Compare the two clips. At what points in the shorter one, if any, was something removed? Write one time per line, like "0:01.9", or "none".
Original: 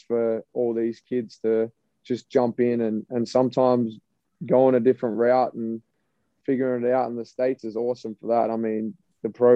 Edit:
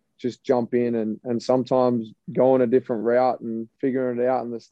0:02.2
0:03.6